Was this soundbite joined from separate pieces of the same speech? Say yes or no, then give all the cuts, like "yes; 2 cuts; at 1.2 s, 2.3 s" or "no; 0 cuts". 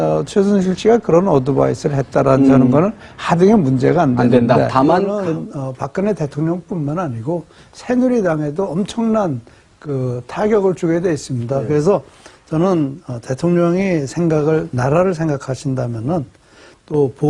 no; 0 cuts